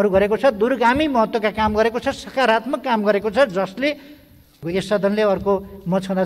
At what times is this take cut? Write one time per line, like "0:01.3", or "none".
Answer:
0:04.5